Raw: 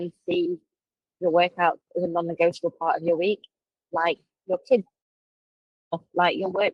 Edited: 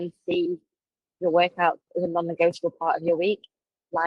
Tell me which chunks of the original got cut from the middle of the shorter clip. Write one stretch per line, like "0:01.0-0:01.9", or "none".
none